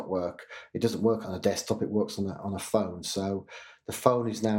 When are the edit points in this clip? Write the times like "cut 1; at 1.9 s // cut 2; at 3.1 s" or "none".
cut 1; at 1.3 s